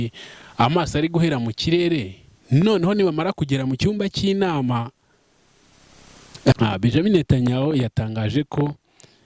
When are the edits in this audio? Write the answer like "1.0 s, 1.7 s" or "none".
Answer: 6.6 s

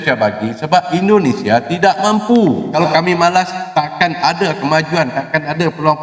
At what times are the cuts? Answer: 2.7 s

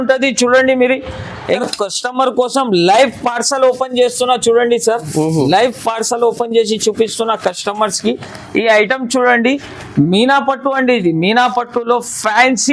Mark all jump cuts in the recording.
1.5 s

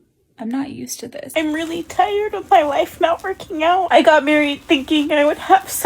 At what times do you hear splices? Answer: 1.3 s, 3.9 s

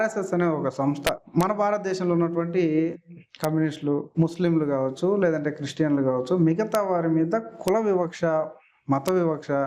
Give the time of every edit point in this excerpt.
1.2 s

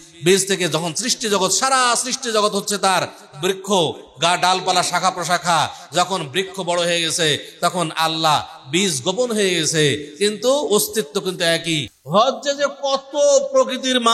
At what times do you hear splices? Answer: 11.9 s

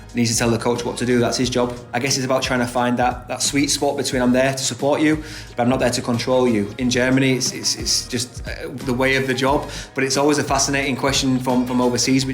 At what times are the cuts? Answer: 1.8 s, 6.7 s, 8.1 s

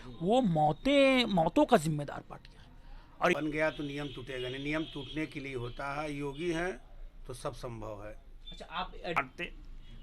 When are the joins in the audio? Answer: 3.3 s, 9.2 s

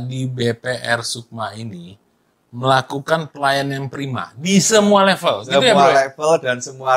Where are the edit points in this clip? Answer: none

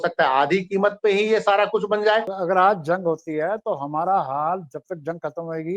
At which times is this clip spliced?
2.3 s

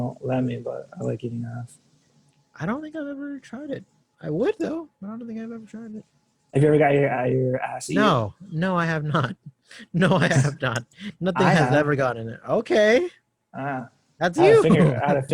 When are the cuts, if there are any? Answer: none

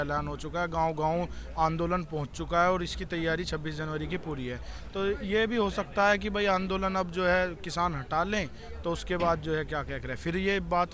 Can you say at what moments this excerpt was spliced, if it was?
none

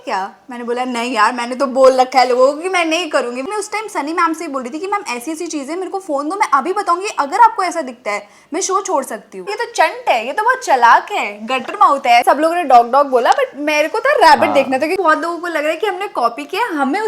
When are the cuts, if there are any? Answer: 3.4 s, 9.5 s, 12.2 s, 15.0 s

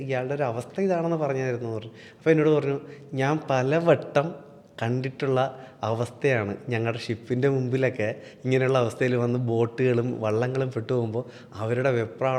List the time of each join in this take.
none

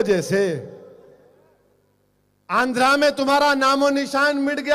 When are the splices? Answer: 1.0 s

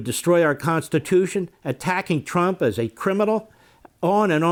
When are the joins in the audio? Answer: none

